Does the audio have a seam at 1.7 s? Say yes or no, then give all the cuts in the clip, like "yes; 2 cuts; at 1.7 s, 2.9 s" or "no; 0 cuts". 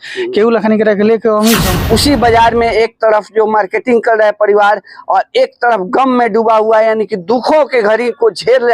yes; 1 cut; at 1.7 s